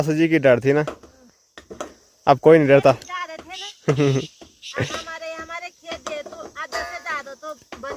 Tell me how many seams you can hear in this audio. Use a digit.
0